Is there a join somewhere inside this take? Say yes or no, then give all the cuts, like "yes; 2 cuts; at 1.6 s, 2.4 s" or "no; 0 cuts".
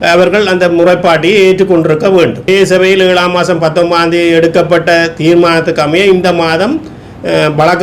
yes; 1 cut; at 2.5 s